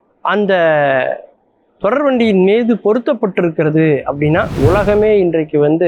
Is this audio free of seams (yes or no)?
no